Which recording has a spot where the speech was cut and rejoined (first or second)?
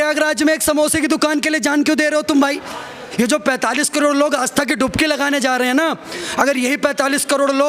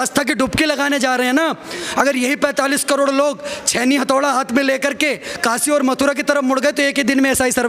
first